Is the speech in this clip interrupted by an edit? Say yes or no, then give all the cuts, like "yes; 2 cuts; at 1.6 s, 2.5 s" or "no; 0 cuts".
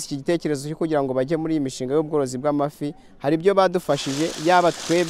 no; 0 cuts